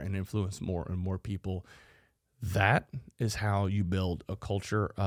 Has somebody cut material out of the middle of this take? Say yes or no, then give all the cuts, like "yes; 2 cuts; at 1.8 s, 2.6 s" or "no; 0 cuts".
no; 0 cuts